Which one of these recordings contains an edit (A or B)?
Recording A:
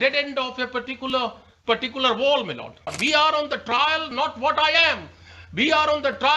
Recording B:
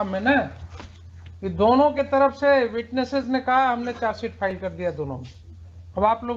A